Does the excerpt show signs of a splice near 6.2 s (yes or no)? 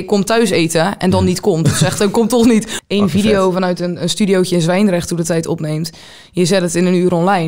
no